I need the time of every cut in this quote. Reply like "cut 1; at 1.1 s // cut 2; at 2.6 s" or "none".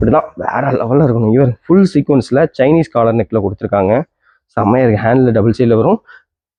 none

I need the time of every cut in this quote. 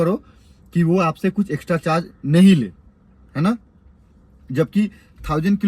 none

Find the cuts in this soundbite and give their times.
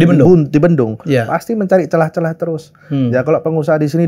none

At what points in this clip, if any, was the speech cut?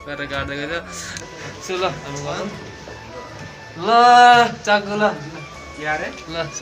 cut 1; at 1.2 s

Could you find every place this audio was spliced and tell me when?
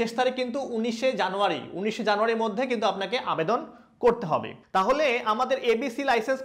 cut 1; at 4.6 s

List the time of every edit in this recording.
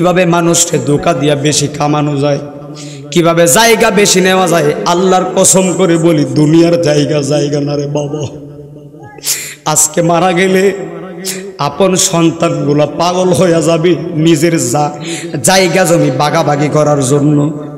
none

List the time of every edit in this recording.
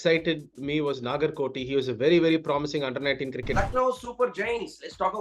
cut 1; at 3.5 s

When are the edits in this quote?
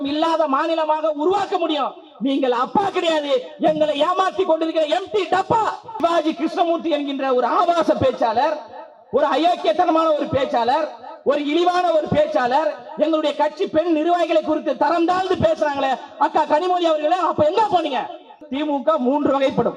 cut 1; at 6.0 s // cut 2; at 18.4 s

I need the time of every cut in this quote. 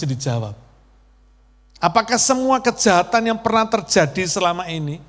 none

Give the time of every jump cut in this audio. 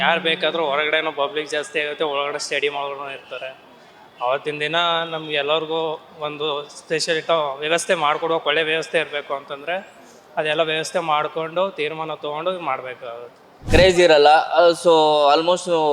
cut 1; at 13.6 s

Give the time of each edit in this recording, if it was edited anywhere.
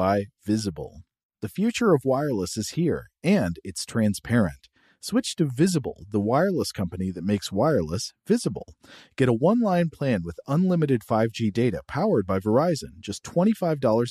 none

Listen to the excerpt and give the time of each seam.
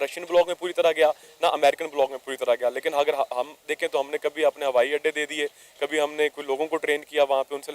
none

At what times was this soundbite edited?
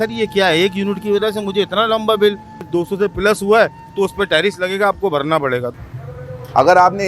cut 1; at 2.6 s // cut 2; at 5.8 s

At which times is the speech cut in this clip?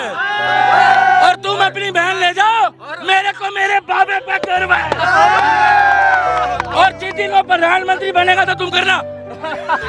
cut 1; at 1.3 s

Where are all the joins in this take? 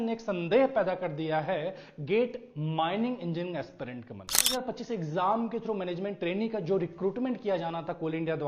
cut 1; at 4.5 s

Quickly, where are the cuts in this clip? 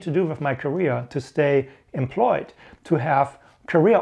none

